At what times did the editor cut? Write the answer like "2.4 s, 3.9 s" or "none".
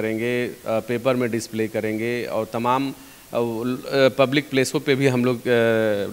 none